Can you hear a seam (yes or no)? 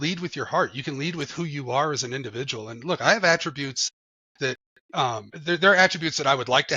no